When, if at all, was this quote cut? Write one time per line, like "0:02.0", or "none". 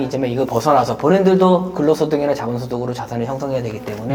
none